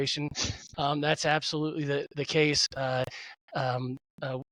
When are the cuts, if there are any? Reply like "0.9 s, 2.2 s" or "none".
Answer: none